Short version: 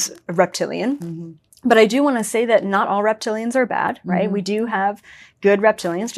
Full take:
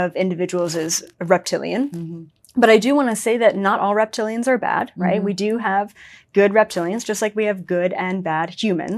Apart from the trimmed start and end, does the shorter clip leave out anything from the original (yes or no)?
no